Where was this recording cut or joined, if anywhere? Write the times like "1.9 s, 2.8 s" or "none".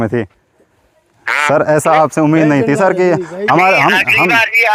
none